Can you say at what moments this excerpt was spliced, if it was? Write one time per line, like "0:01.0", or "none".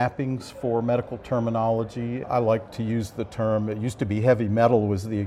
0:02.2